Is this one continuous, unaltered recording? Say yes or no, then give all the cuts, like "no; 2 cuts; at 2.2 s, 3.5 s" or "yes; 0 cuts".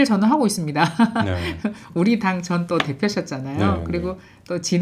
yes; 0 cuts